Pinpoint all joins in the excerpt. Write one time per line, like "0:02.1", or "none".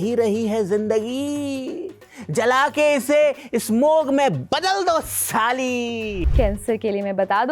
0:06.2